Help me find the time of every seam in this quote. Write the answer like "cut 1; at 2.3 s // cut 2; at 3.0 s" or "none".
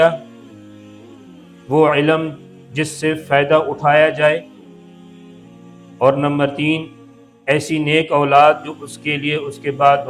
none